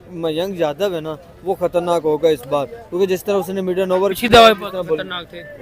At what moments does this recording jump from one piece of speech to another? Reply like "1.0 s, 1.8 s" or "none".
4.6 s